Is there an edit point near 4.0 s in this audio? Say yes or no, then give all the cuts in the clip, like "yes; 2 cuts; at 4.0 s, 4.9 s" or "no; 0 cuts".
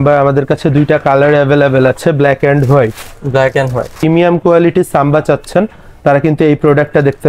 yes; 1 cut; at 4.0 s